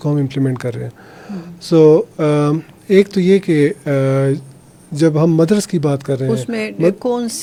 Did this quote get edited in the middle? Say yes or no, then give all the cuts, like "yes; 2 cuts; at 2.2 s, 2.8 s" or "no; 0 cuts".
no; 0 cuts